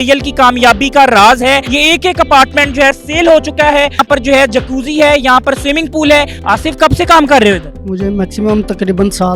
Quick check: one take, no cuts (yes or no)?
no